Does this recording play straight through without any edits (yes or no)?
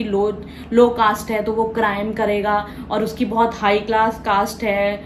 yes